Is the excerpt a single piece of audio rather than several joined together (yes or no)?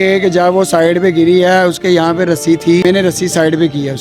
no